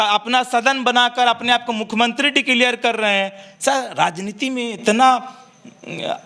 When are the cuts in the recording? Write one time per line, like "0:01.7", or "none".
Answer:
none